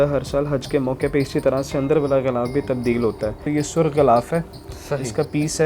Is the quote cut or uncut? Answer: cut